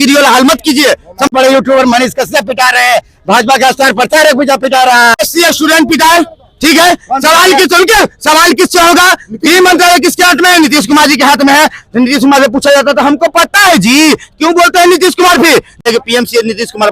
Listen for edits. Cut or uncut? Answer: cut